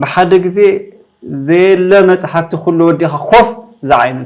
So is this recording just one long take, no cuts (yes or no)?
yes